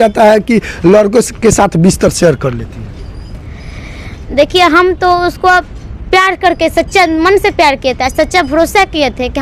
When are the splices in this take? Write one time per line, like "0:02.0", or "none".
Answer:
none